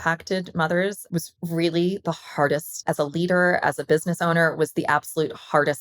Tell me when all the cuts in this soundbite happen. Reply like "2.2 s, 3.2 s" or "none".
1.0 s, 2.8 s